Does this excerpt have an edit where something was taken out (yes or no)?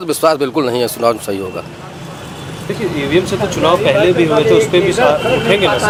no